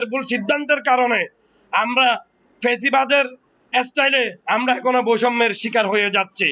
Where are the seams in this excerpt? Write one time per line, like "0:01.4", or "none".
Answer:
none